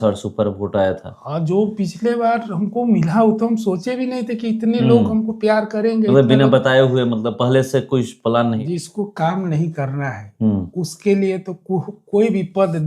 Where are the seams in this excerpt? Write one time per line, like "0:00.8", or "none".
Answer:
0:08.6